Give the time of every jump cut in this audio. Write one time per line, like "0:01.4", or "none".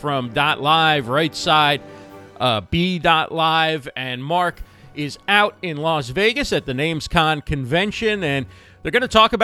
none

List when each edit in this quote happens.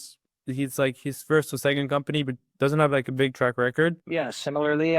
0:04.0

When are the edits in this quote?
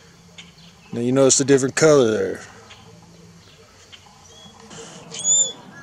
0:04.7

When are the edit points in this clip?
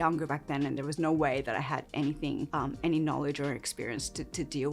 none

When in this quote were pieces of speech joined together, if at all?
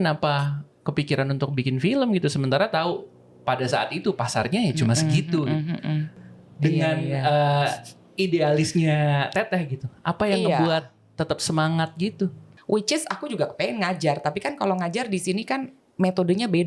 0:06.1
0:12.5

